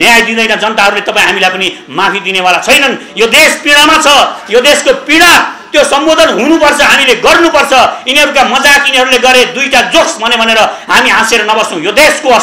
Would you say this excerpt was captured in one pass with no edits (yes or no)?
yes